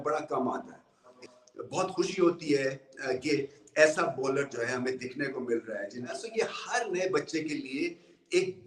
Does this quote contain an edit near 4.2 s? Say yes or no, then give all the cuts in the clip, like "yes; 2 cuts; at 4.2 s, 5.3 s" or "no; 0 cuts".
no; 2 cuts; at 1.2 s, 6.2 s